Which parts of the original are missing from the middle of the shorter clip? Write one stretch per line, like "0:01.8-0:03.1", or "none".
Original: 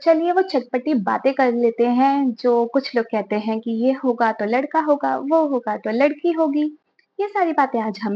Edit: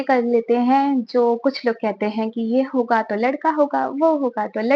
none